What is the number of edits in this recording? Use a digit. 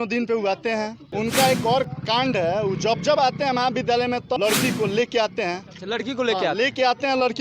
2